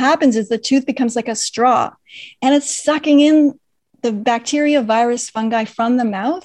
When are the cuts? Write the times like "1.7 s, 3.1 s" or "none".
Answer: none

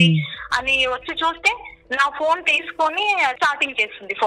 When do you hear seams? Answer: 3.4 s

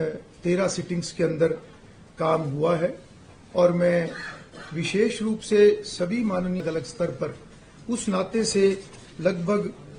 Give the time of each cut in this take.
6.6 s

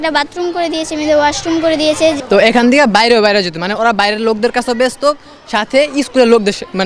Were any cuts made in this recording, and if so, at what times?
2.2 s

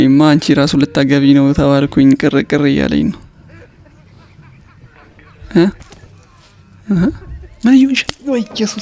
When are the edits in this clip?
none

